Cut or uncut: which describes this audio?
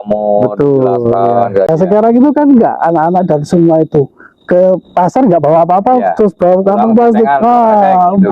cut